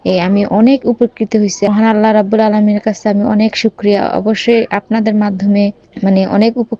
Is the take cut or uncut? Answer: cut